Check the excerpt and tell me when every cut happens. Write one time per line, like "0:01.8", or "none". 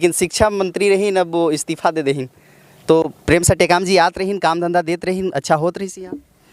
none